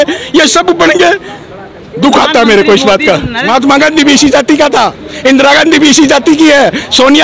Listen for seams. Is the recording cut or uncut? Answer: cut